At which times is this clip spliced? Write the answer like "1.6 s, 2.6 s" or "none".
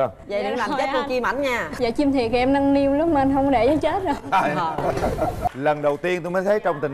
5.5 s